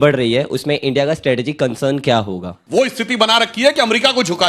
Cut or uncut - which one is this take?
cut